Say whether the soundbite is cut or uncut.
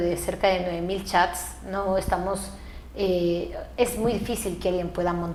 uncut